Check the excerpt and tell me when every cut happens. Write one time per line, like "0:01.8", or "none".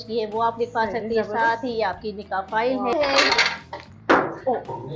0:02.9

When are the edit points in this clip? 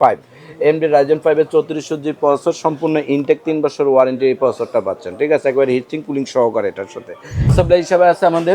0:07.5

